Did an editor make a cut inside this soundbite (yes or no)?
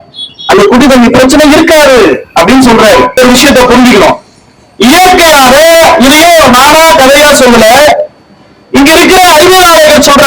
yes